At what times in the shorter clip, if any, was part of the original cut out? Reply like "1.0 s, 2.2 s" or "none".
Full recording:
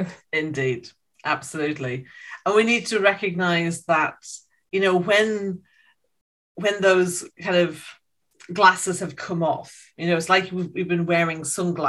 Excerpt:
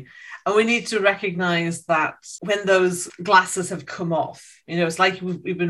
2.3 s, 3.1 s